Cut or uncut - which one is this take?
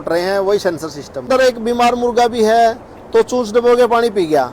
cut